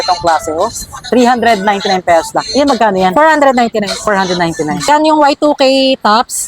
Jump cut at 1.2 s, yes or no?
no